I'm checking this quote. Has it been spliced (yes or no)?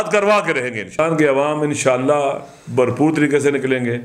yes